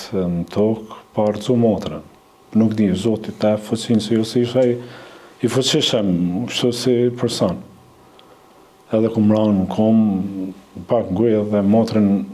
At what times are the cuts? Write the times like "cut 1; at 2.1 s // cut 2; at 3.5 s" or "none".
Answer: none